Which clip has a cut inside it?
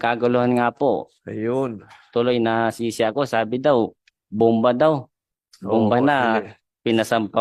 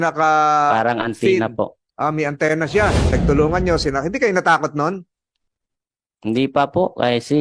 second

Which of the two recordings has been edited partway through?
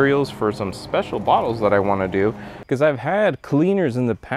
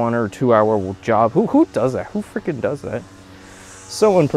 first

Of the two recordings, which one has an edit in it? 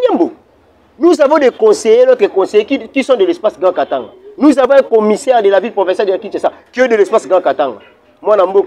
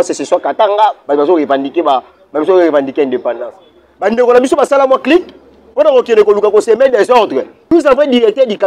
second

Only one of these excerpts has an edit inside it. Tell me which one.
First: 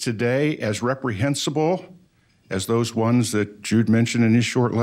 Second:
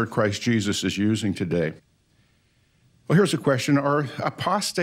second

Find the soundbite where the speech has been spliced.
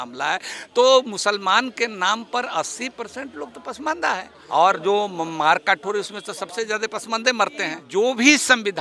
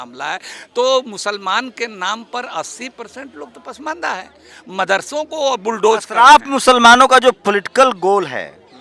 first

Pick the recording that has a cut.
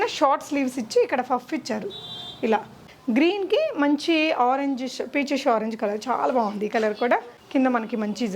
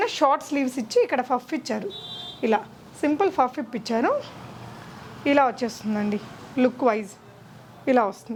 first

